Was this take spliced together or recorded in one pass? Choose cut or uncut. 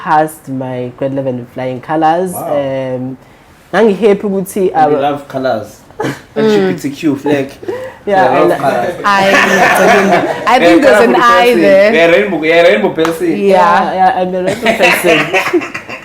uncut